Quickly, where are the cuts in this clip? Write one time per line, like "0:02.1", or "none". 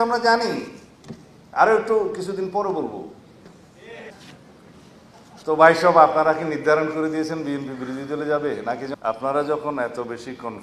0:04.1
0:08.9

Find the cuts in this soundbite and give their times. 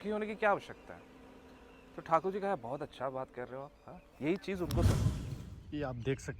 0:05.0

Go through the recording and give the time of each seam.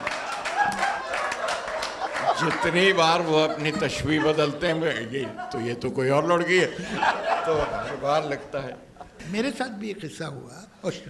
0:09.2

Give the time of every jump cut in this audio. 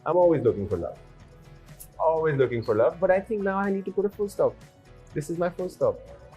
none

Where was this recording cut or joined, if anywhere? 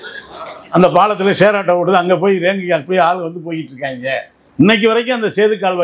0:04.4

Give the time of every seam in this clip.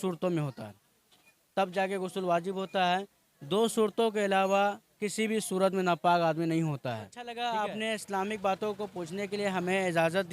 0:07.2

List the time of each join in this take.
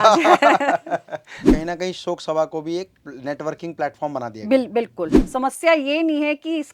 0:01.5
0:05.2

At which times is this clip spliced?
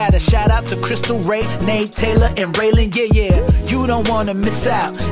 none

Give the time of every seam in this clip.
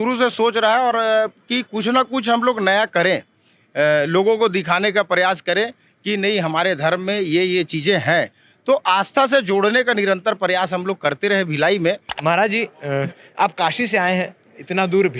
0:12.1

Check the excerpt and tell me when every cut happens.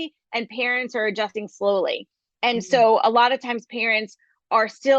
0:01.3

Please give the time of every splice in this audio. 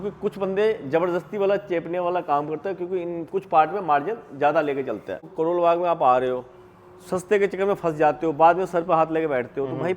0:05.2

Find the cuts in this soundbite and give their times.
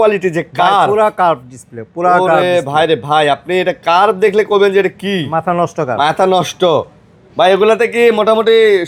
none

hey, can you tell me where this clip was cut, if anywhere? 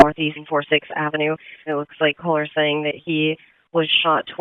0:01.5

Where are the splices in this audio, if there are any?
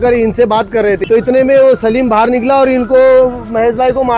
0:01.0

